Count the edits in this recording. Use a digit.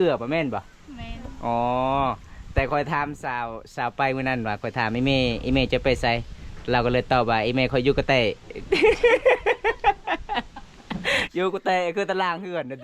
1